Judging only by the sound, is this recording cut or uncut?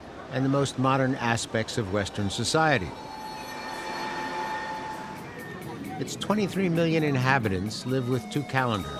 cut